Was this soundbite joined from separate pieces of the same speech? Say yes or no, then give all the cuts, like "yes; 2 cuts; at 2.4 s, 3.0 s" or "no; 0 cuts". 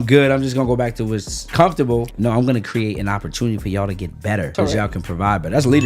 yes; 3 cuts; at 1.5 s, 2.1 s, 4.5 s